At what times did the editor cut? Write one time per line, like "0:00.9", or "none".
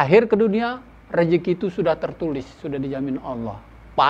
none